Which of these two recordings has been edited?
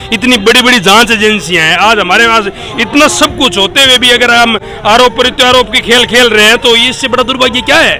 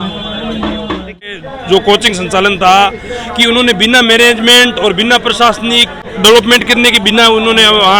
second; 2 cuts; at 1.3 s, 6.0 s

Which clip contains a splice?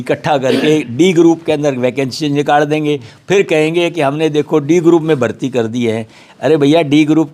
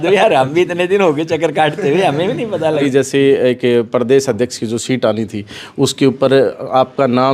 second; 1 cut; at 2.8 s

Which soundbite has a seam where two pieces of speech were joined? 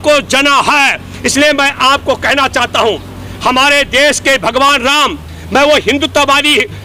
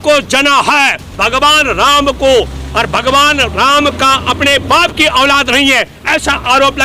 second; 1 cut; at 1.1 s

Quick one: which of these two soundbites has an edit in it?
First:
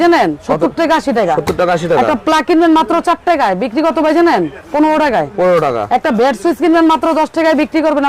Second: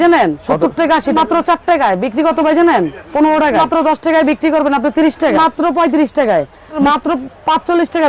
second; 4 cuts; at 1.2 s, 3.6 s, 5.4 s, 6.8 s

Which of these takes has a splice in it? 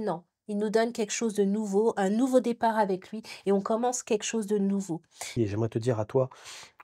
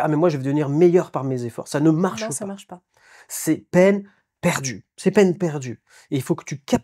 first; 1 cut; at 5.3 s

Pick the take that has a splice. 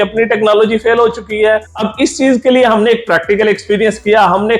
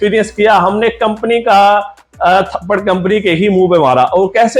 first; 1 cut; at 1.8 s

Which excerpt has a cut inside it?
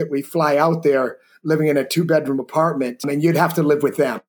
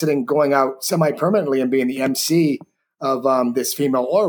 first; 1 cut; at 3.0 s

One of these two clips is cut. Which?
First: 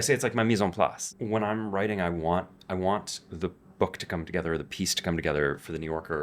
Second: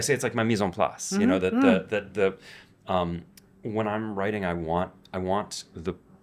first; 1 cut; at 1.0 s

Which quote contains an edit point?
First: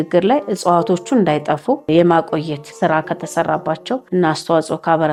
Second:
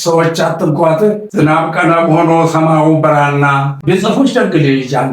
second; 1 cut; at 3.7 s

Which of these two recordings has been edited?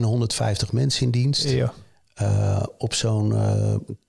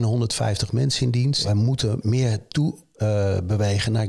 second; 1 cut; at 1.4 s

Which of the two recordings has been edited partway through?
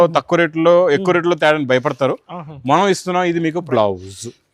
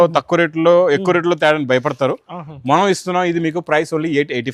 first; 1 cut; at 3.6 s

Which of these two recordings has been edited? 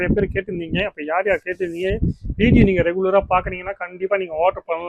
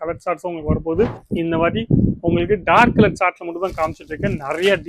second; 1 cut; at 1.2 s

